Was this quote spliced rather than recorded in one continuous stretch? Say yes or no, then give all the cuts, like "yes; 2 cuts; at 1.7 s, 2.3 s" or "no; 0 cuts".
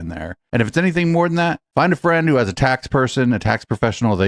no; 0 cuts